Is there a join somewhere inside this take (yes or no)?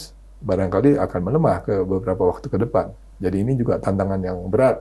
no